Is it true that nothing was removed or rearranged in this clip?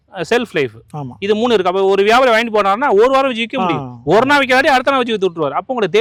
yes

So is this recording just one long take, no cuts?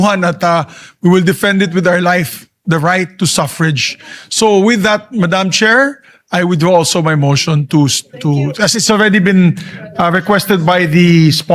yes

